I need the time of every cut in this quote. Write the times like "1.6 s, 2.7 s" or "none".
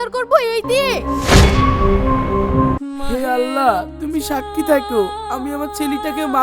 1.0 s, 2.8 s